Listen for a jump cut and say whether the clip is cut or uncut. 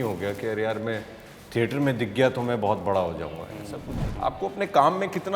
cut